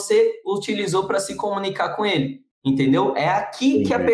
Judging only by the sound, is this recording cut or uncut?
cut